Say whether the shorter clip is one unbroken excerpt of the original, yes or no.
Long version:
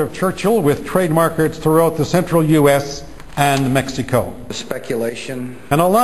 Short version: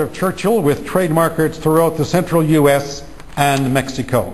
yes